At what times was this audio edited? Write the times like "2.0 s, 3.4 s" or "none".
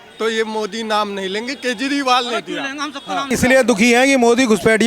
3.2 s

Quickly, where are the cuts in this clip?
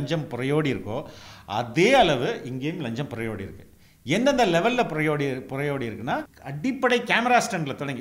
6.4 s

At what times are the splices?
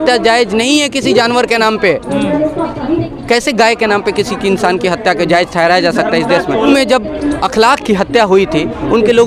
none

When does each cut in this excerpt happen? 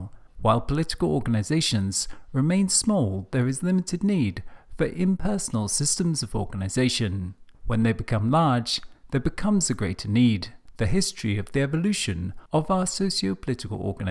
11.5 s

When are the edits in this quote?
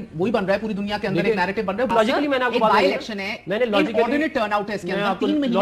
1.9 s

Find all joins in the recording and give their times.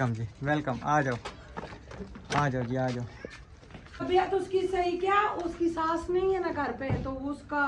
4.0 s

